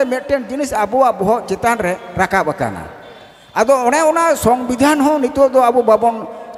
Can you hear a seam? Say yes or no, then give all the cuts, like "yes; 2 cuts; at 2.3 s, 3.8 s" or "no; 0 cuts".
no; 0 cuts